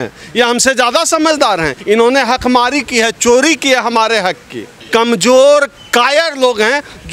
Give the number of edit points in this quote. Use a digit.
2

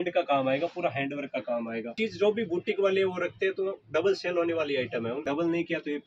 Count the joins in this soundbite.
2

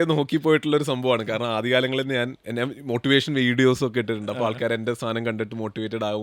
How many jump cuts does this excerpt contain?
0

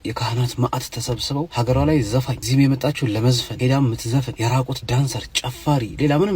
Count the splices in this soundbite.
4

